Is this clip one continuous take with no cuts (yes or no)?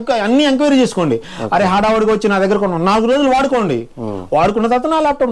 yes